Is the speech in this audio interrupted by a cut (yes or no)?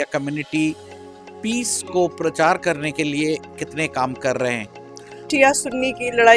yes